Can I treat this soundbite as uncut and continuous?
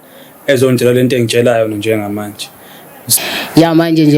no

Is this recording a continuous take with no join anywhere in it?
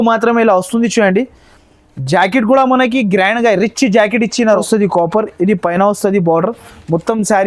no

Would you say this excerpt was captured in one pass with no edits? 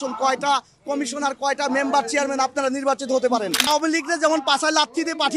no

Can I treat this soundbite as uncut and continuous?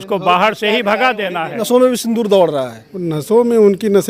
no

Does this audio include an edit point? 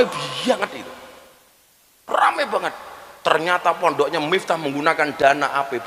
no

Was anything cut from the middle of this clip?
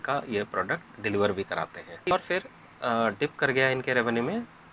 yes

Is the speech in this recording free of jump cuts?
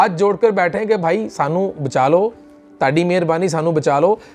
yes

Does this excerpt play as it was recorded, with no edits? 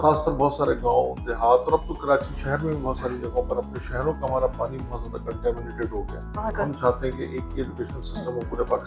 no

